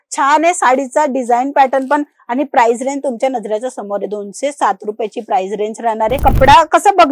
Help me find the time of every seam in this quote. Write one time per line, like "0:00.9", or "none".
0:06.2